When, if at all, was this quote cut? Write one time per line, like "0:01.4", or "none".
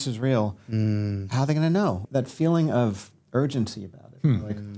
0:02.0